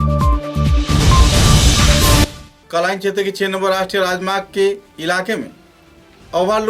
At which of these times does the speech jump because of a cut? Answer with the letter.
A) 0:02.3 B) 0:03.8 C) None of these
C